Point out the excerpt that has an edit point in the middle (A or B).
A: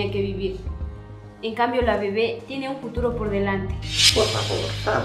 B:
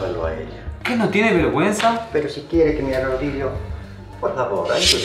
A